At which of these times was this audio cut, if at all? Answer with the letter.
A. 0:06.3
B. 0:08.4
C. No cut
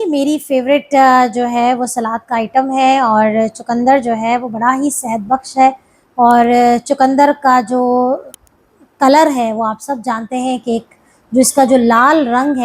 C